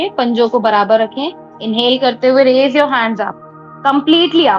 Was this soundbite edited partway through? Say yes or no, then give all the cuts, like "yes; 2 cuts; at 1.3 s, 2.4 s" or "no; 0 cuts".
no; 0 cuts